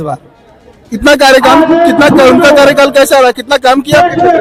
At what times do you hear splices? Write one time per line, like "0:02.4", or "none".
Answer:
none